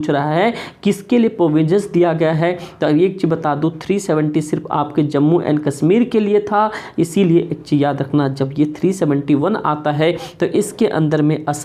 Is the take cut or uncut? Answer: uncut